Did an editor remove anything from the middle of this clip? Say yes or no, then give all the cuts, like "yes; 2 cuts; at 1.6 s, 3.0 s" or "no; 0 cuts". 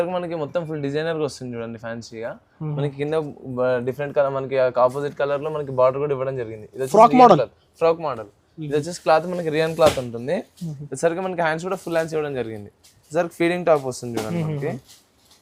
no; 0 cuts